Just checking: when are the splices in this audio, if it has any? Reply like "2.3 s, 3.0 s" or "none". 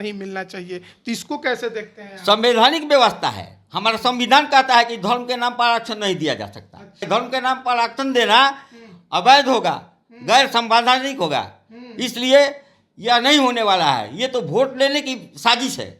7.1 s